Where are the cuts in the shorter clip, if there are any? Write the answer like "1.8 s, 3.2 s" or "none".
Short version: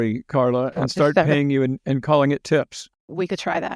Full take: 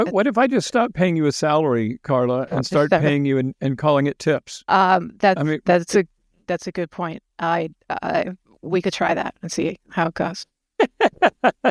2.8 s